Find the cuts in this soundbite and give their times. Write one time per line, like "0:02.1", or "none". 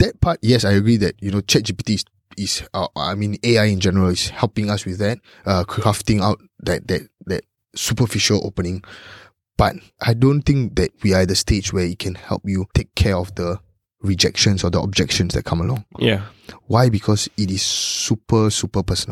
0:09.9
0:11.0
0:12.7